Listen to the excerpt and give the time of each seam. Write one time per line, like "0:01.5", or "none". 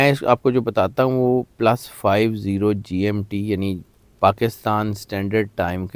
none